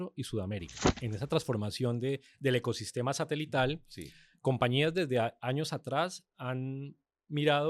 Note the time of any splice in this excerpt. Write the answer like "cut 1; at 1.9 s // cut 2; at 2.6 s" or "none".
cut 1; at 1.0 s